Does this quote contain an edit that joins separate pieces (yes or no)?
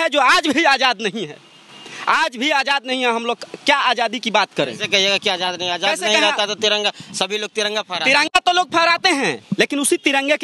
no